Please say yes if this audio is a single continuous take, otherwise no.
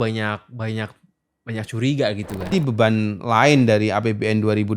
no